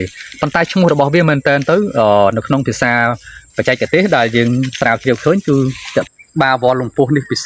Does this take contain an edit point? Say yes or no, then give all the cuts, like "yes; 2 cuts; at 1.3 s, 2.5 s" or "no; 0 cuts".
yes; 1 cut; at 6.1 s